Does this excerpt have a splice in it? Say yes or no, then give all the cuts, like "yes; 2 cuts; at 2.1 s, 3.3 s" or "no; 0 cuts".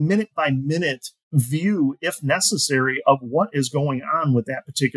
yes; 1 cut; at 1.1 s